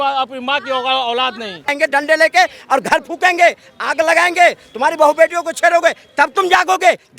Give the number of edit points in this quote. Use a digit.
1